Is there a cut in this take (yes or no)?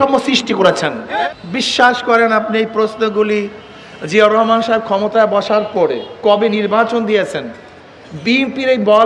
yes